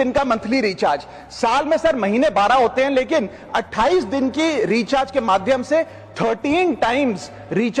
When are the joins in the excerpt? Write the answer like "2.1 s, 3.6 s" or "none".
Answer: none